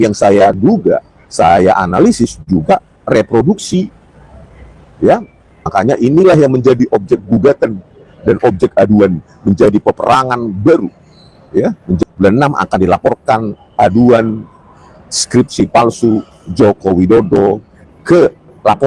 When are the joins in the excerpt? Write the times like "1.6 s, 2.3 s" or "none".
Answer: 5.6 s, 12.0 s